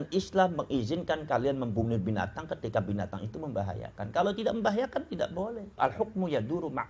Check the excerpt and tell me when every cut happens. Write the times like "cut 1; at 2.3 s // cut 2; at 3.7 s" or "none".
cut 1; at 5.7 s